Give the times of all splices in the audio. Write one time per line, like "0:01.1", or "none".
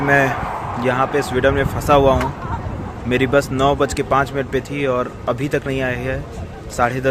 none